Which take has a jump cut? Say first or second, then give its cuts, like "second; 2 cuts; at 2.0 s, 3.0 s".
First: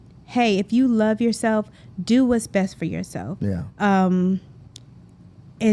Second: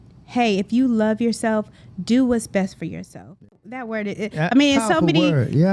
second; 1 cut; at 3.7 s